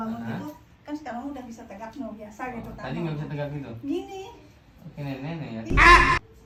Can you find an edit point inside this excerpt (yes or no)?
no